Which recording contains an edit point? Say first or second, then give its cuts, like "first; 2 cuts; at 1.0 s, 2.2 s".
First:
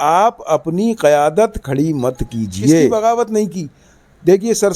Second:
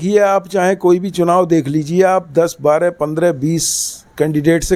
first; 1 cut; at 2.9 s